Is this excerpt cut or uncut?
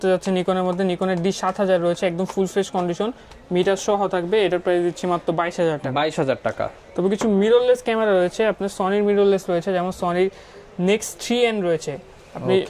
uncut